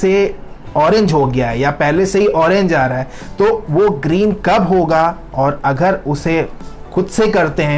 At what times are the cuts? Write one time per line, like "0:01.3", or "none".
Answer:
none